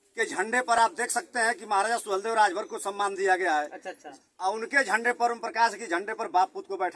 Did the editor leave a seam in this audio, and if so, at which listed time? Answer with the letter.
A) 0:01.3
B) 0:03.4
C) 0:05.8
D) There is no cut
D